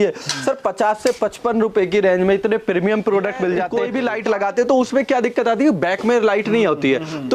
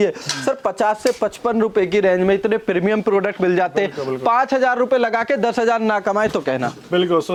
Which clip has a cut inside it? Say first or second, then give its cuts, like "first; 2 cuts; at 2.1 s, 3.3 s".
first; 1 cut; at 3.8 s